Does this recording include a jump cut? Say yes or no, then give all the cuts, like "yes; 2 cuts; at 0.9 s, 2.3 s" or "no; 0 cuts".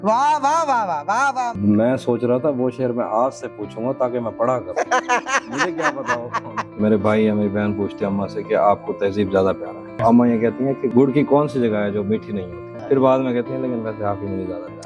yes; 5 cuts; at 1.5 s, 6.8 s, 10.0 s, 10.8 s, 12.7 s